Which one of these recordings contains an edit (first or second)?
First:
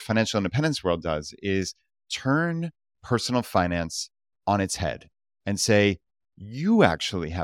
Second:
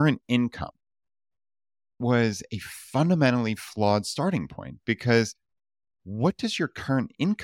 second